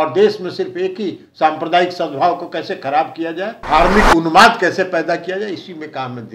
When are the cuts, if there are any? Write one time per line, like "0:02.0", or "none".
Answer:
0:03.6